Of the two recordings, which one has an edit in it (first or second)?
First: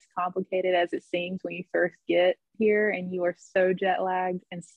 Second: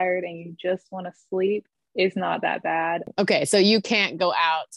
second